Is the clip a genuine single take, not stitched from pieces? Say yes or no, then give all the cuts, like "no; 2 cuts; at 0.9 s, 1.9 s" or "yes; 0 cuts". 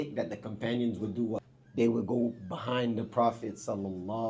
no; 1 cut; at 1.3 s